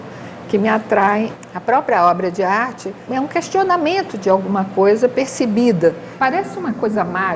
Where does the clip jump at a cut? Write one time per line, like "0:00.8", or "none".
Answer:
0:01.4
0:03.0
0:06.1